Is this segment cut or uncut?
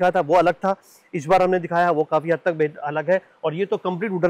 uncut